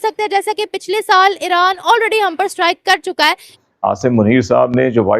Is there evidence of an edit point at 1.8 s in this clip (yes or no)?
no